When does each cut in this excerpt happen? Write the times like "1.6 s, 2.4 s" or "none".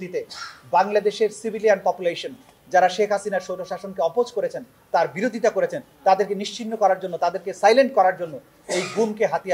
none